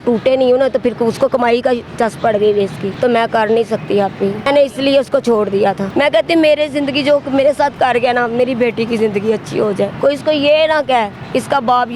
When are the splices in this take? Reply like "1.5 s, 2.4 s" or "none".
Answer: 2.9 s, 4.5 s, 5.8 s, 9.9 s